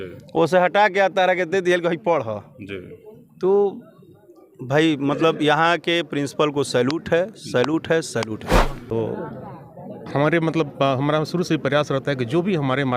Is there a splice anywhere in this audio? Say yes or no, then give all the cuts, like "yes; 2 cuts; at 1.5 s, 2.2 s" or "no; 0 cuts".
yes; 1 cut; at 8.8 s